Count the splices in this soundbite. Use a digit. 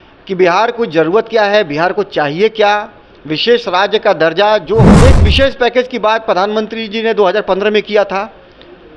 1